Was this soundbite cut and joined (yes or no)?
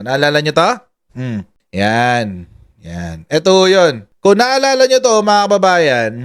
no